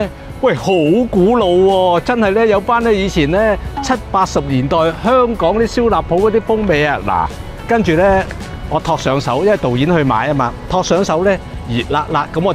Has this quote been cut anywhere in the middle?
no; 0 cuts

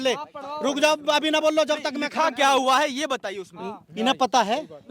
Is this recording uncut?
yes; 0 cuts

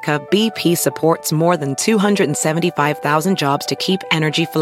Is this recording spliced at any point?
no; 0 cuts

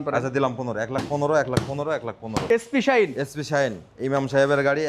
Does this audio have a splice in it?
yes; 1 cut; at 2.3 s

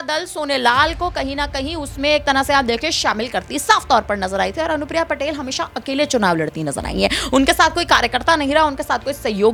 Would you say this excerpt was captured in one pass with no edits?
yes; 0 cuts

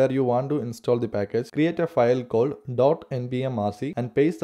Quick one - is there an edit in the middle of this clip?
no; 0 cuts

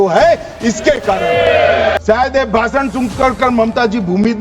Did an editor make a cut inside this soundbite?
yes; 1 cut; at 2.0 s

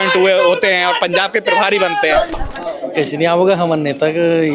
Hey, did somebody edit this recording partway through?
yes; 1 cut; at 2.3 s

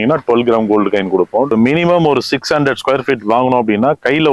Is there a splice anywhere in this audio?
yes; 1 cut; at 1.5 s

